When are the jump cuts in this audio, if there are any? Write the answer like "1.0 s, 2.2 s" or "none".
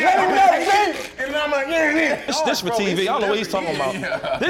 2.2 s